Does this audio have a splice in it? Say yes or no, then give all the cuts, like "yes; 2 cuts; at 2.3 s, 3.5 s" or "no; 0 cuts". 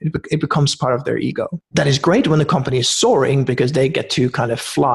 yes; 1 cut; at 1.6 s